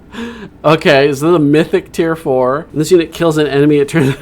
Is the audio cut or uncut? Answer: cut